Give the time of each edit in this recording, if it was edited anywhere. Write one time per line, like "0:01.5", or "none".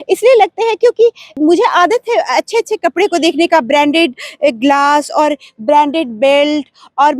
0:01.2